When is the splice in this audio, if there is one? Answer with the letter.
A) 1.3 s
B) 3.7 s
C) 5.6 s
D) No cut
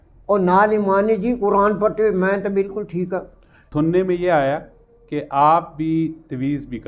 B